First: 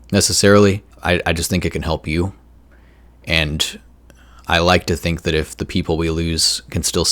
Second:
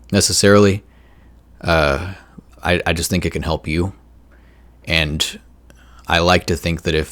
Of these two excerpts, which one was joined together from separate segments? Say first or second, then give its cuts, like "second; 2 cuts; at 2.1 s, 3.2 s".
first; 1 cut; at 0.9 s